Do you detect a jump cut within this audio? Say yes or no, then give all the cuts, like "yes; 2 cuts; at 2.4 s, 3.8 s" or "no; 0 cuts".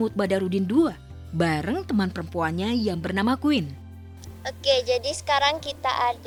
no; 0 cuts